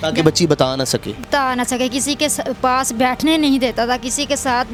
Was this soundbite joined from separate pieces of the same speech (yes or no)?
no